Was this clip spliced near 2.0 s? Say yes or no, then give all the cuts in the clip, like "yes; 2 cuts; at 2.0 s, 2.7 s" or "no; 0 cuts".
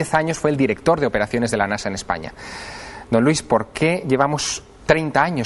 yes; 1 cut; at 2.0 s